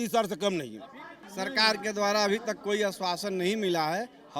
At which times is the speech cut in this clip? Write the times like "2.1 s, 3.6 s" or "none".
1.2 s